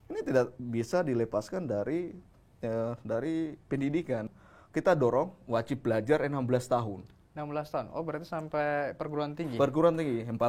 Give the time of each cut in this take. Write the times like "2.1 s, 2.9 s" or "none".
4.2 s